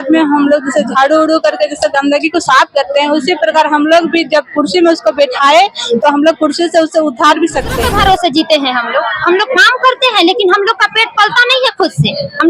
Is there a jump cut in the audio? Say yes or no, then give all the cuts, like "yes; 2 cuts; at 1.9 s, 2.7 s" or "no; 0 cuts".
yes; 1 cut; at 7.8 s